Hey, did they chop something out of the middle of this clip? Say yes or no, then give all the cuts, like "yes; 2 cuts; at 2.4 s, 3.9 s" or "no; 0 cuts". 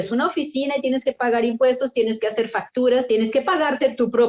yes; 1 cut; at 3.1 s